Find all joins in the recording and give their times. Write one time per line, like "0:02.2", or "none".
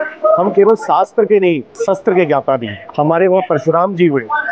0:01.7
0:02.8